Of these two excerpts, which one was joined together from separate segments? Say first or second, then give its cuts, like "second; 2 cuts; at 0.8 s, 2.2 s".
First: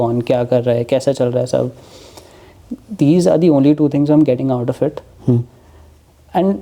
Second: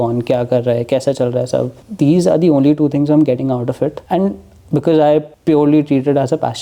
second; 3 cuts; at 1.8 s, 4.0 s, 5.3 s